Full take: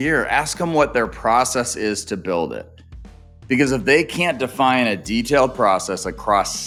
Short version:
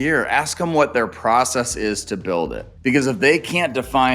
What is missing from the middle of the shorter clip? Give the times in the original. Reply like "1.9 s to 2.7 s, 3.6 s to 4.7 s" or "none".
2.7 s to 3.3 s